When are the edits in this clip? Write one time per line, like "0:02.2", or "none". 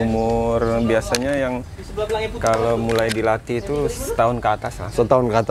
none